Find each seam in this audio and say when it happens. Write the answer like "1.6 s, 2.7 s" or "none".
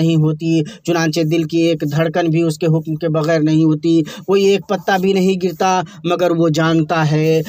none